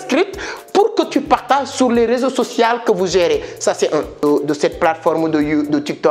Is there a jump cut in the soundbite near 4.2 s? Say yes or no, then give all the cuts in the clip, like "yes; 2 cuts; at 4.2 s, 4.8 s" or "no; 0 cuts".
yes; 1 cut; at 4.2 s